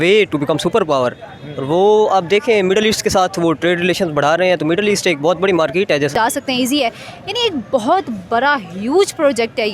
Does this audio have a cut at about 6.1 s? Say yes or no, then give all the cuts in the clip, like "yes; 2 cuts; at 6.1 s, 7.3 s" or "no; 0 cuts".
yes; 1 cut; at 6.1 s